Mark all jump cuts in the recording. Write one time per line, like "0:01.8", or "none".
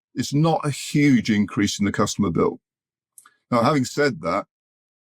none